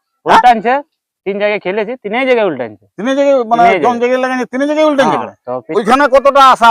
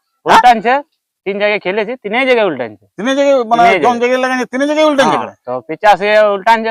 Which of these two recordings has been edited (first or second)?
first